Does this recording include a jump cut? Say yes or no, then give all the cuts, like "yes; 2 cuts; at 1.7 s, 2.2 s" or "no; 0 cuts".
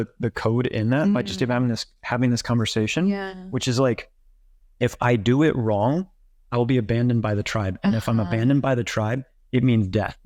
no; 0 cuts